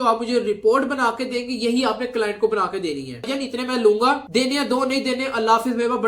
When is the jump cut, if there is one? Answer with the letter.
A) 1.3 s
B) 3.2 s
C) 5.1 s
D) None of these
B